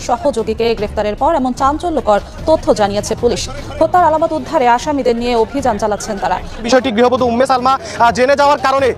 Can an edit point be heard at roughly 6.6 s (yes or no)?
yes